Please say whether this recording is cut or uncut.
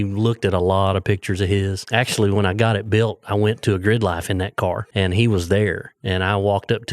cut